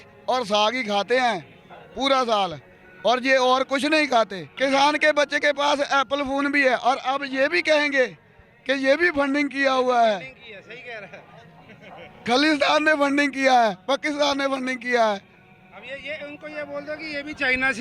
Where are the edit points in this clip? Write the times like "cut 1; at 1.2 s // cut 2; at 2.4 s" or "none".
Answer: none